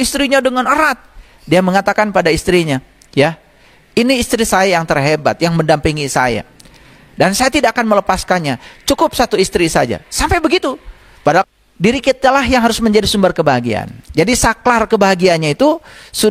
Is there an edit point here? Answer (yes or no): yes